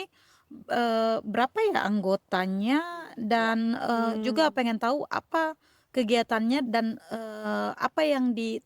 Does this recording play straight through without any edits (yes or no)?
no